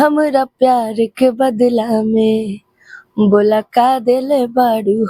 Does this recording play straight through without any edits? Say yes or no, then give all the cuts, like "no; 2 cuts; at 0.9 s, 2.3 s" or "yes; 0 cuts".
yes; 0 cuts